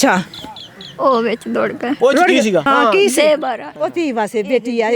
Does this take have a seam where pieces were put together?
yes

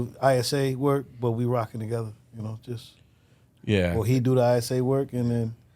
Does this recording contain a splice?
no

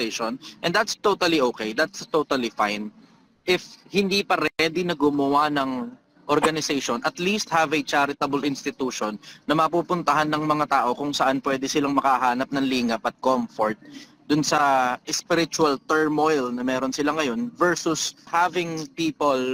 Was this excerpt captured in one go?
no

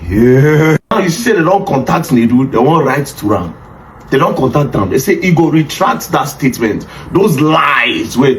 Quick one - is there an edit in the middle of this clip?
yes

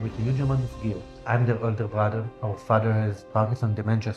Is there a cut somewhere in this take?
yes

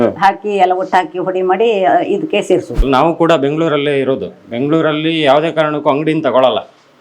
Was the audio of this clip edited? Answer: yes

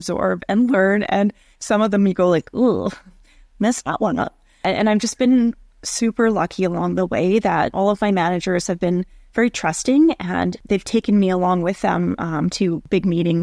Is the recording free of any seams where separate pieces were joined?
no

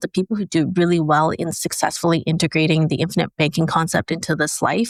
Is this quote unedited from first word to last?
yes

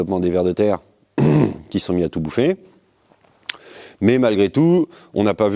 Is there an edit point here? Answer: no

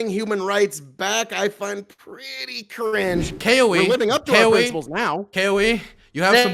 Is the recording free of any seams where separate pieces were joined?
no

